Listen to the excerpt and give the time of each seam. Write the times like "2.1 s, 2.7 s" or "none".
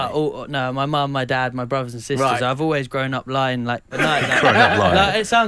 3.9 s